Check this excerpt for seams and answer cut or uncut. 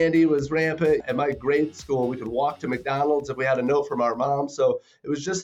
cut